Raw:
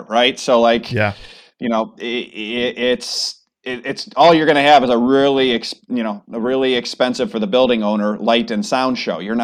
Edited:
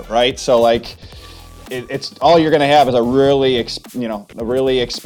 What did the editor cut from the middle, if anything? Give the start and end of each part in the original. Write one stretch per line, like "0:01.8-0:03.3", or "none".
0:01.0-0:02.9